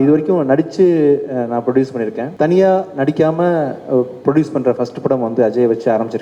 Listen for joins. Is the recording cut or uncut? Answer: cut